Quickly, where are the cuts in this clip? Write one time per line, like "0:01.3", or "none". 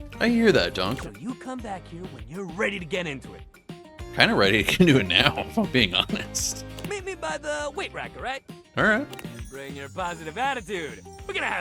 0:01.0